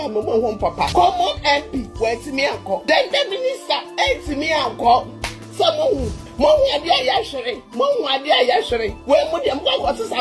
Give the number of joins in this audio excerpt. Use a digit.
4